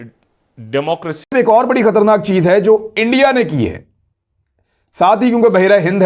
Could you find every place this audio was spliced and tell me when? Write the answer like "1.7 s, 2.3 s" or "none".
1.3 s